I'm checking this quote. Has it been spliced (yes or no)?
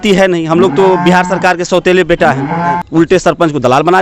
yes